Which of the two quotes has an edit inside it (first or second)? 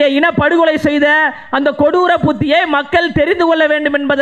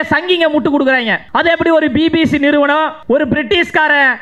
second